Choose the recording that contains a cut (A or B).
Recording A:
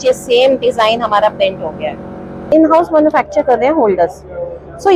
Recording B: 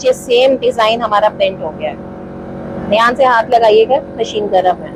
A